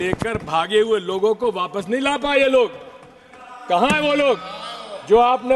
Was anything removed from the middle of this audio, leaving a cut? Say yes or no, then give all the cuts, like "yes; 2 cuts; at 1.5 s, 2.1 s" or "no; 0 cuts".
no; 0 cuts